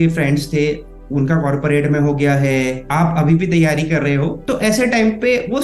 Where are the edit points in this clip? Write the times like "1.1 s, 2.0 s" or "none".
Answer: 2.8 s, 4.4 s